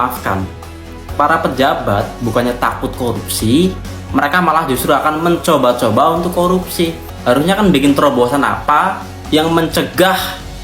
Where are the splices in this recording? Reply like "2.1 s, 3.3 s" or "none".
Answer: 7.1 s